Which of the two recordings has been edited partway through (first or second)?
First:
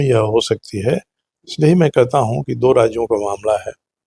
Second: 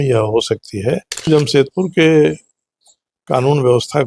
second